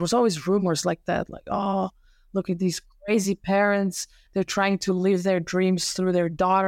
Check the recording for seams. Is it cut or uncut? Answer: uncut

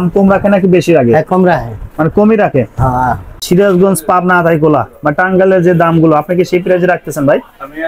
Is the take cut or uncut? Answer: cut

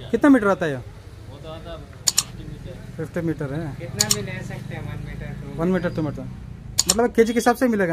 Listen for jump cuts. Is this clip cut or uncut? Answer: uncut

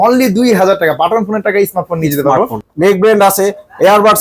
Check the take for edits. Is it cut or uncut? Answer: cut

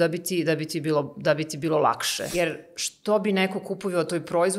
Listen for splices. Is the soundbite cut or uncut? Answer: cut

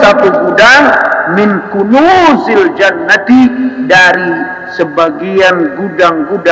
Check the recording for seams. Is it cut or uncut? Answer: uncut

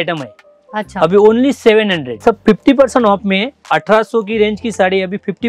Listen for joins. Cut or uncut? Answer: cut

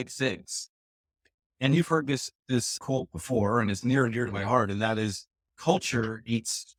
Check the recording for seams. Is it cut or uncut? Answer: uncut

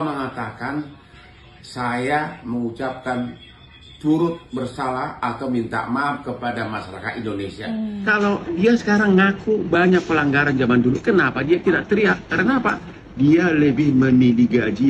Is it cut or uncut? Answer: cut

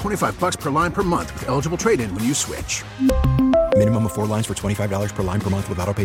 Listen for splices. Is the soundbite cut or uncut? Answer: uncut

